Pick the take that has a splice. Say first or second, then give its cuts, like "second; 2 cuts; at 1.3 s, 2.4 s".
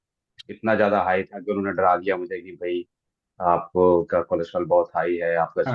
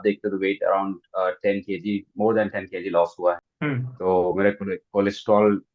second; 1 cut; at 3.5 s